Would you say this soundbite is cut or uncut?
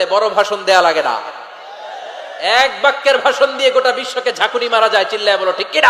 uncut